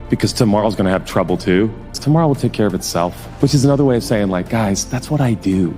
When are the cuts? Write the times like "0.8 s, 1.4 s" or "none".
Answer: 2.0 s, 3.2 s